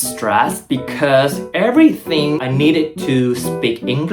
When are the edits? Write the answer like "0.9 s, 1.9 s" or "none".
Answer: 2.5 s